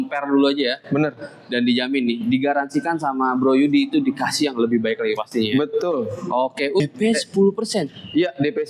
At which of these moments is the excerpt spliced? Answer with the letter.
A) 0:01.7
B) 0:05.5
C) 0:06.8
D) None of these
C